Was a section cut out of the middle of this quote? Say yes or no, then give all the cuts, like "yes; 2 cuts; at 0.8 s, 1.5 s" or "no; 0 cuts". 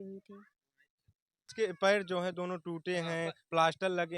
yes; 1 cut; at 1.5 s